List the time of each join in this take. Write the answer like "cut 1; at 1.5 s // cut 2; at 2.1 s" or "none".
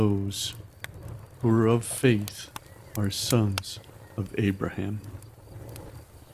cut 1; at 5.0 s